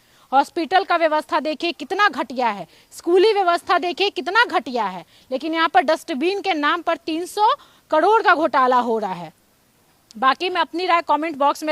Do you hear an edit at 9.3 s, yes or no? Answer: no